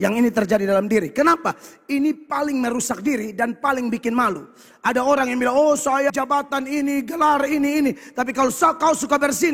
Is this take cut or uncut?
cut